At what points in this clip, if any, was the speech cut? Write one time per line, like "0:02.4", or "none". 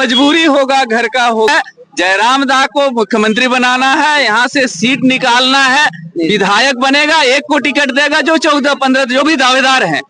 0:01.5